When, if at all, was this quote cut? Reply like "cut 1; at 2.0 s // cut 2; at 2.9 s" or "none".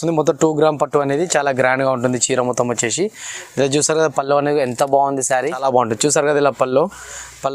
cut 1; at 5.4 s